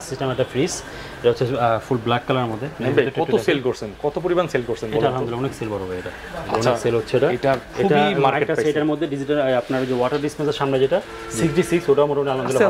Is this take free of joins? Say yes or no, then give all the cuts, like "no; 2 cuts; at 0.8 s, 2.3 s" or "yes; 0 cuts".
yes; 0 cuts